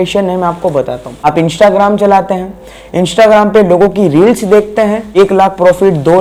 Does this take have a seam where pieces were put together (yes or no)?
no